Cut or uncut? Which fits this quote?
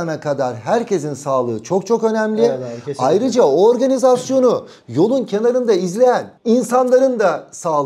uncut